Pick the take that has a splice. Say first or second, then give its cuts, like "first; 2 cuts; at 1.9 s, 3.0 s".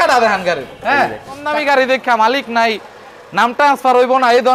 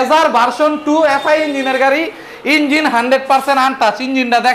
first; 1 cut; at 1.4 s